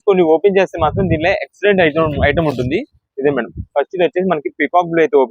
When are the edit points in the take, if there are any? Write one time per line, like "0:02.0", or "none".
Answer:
none